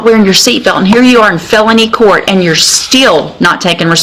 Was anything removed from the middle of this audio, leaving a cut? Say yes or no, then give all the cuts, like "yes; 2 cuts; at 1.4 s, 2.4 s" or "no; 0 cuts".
no; 0 cuts